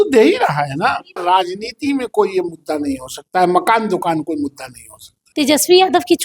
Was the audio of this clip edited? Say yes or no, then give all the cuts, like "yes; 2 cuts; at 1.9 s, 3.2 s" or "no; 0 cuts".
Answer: yes; 2 cuts; at 1.2 s, 5.2 s